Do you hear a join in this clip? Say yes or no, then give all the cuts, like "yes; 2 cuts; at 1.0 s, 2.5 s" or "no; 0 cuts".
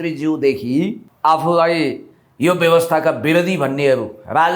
yes; 1 cut; at 1.1 s